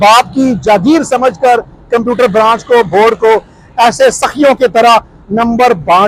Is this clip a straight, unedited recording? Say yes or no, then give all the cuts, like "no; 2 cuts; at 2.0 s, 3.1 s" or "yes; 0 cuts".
yes; 0 cuts